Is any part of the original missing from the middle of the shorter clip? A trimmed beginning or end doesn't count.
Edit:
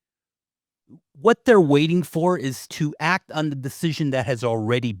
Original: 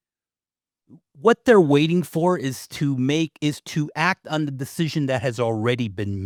yes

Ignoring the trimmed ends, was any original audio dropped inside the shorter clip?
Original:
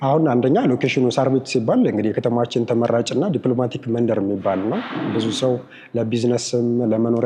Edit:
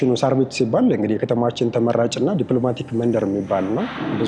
no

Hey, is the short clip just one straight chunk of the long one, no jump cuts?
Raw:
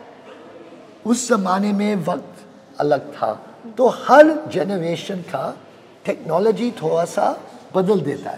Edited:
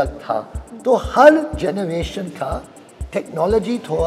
yes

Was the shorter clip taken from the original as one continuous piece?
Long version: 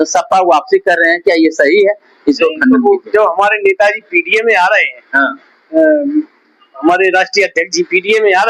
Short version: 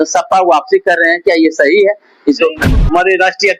no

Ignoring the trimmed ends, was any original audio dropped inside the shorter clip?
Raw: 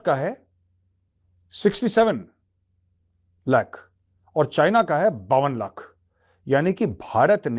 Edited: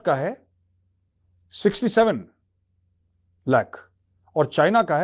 no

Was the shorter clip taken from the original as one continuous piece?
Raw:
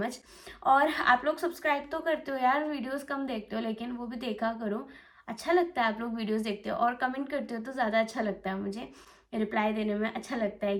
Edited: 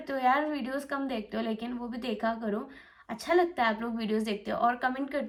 yes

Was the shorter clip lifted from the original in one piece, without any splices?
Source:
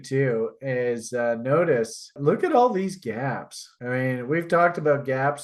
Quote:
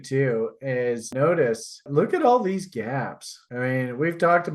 no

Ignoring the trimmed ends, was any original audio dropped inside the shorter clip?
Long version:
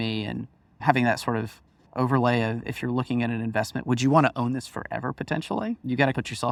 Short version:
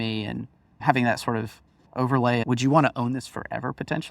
yes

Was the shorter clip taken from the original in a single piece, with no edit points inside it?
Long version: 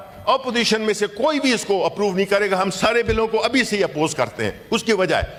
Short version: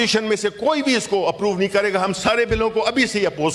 yes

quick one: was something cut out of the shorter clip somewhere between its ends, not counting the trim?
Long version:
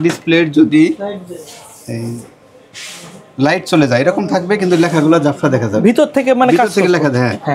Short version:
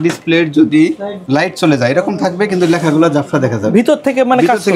yes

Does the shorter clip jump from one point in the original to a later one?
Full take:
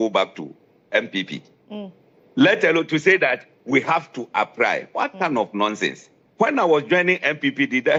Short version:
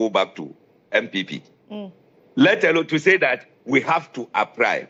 no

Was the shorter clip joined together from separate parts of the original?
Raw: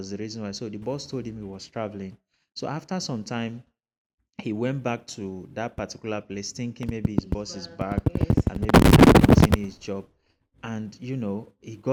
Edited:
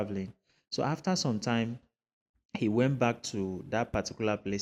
no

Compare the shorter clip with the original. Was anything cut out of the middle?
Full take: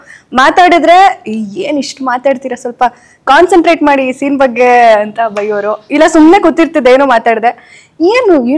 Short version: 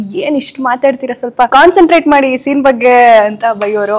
yes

